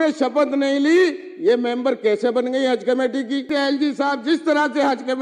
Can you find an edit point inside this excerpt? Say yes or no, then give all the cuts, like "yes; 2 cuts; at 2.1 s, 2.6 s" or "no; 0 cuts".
yes; 1 cut; at 3.5 s